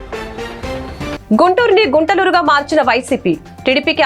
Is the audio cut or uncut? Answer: cut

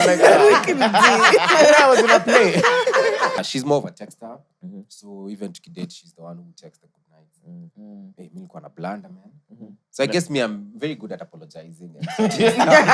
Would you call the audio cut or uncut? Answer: cut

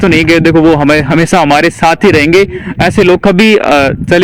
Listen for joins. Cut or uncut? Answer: uncut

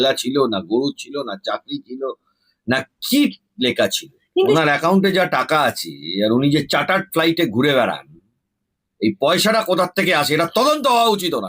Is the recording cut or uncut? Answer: cut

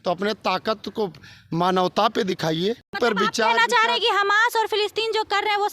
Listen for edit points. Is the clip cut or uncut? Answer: cut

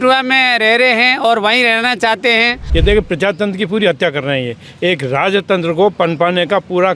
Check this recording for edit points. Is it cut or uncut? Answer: cut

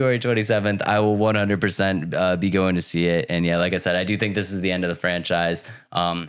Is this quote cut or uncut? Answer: uncut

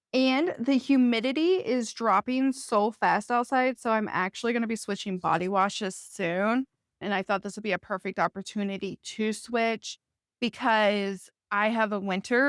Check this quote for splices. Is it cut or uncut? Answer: uncut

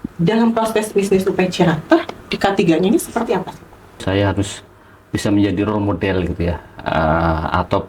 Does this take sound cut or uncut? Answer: cut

